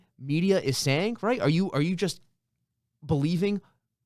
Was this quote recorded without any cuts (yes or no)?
yes